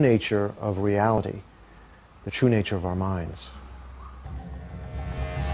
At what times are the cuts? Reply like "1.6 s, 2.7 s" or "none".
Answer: none